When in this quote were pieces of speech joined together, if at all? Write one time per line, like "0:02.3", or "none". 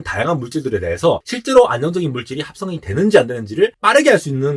none